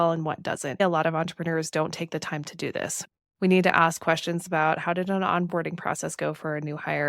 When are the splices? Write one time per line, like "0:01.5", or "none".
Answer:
0:00.8
0:03.0